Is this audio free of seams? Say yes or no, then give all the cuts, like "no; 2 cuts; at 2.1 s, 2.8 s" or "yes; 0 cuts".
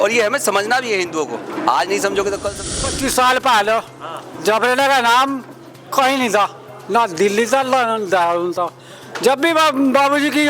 no; 1 cut; at 2.8 s